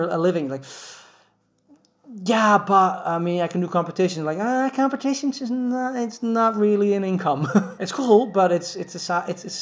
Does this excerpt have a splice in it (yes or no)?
yes